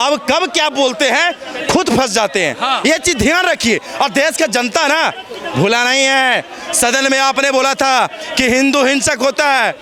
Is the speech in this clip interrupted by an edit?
no; 0 cuts

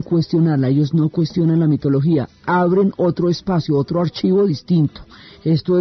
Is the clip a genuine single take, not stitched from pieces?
yes; 0 cuts

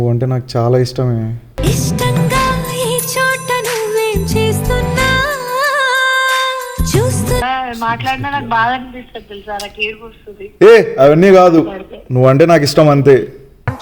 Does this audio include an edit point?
yes; 1 cut; at 7.4 s

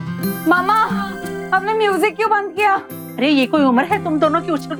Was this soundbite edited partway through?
no; 0 cuts

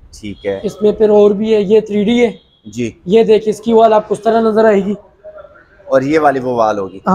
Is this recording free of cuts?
yes; 0 cuts

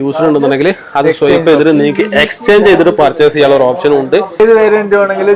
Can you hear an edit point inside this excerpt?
yes; 1 cut; at 4.4 s

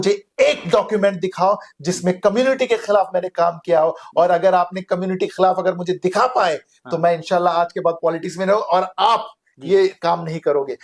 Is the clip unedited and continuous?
yes; 0 cuts

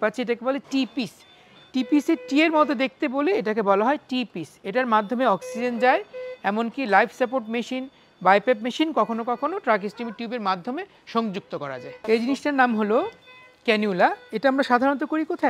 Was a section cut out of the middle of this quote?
no; 0 cuts

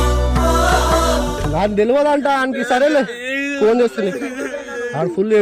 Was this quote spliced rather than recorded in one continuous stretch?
yes; 1 cut; at 1.4 s

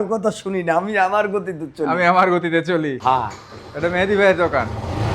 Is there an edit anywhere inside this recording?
yes; 1 cut; at 2.9 s

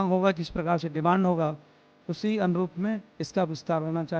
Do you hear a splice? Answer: no; 0 cuts

